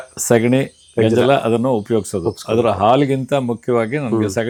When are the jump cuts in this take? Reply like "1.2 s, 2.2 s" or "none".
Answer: none